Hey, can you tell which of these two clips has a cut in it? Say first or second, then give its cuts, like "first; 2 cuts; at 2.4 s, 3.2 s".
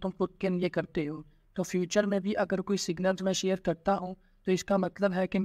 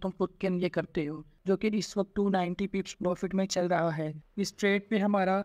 second; 2 cuts; at 1.3 s, 4.2 s